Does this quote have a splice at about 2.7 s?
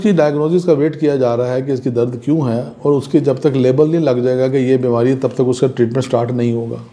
no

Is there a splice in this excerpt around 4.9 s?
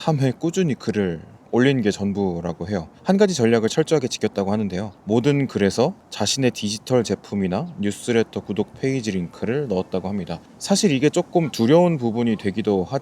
yes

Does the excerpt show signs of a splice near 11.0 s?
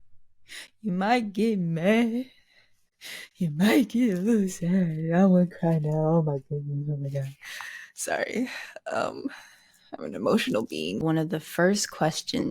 yes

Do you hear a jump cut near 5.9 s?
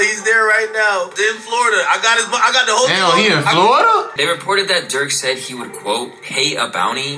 no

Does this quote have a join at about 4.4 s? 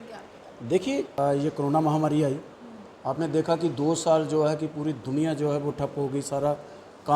no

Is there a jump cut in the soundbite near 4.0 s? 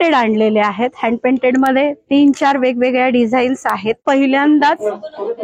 yes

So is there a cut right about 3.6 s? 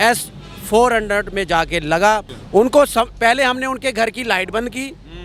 no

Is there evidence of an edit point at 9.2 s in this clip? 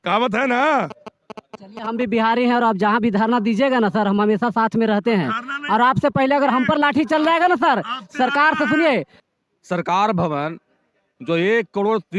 yes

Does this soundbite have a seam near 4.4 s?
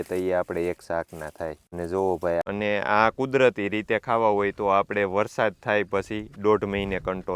no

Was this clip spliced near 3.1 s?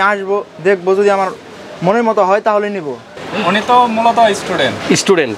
yes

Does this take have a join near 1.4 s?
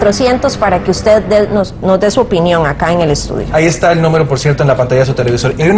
no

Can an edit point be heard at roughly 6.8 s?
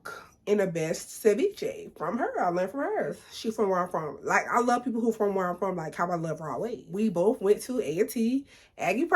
yes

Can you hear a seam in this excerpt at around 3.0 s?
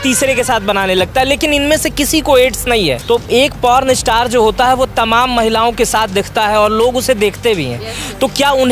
yes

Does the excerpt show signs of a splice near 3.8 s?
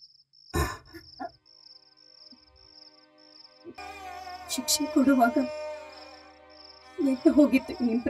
yes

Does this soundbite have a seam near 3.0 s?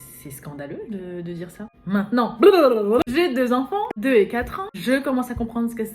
yes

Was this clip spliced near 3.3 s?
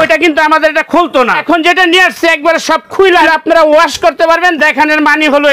yes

